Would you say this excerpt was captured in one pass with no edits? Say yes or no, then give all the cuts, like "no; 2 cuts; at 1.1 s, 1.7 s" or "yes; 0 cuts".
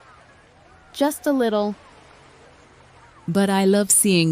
no; 1 cut; at 1.0 s